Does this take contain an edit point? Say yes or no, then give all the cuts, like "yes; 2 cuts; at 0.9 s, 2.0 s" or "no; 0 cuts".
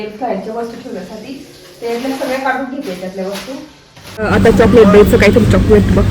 yes; 1 cut; at 4.2 s